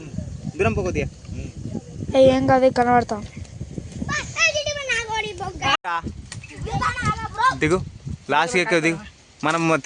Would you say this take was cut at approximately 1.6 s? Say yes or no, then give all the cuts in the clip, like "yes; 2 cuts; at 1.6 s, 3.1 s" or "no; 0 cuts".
no; 1 cut; at 5.8 s